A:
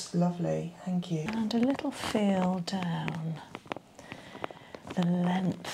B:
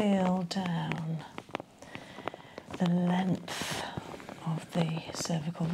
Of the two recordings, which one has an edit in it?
A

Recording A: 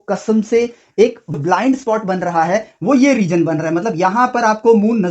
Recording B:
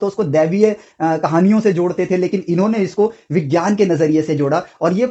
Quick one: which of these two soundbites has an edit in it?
A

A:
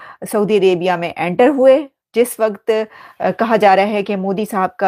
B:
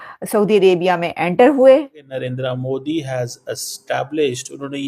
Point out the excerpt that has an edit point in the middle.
B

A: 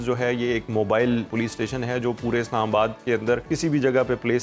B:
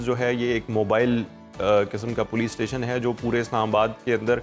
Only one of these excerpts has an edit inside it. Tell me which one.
A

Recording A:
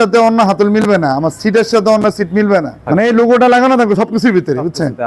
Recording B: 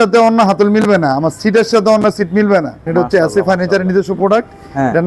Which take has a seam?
B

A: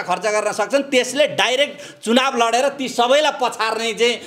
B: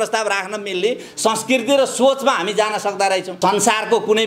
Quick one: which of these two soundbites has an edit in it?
B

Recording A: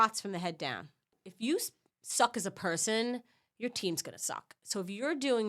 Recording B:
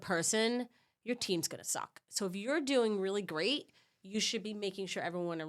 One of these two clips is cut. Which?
A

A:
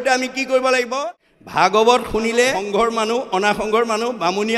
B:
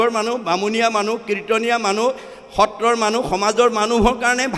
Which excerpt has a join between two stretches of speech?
A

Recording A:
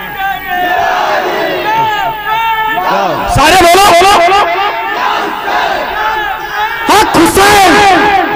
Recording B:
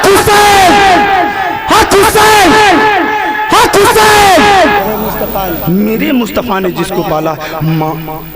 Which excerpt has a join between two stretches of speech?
B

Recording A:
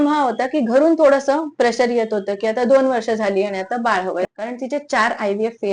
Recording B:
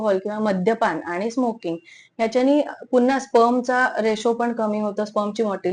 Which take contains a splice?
A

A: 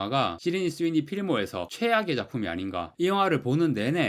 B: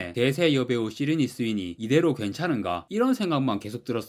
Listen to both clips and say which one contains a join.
A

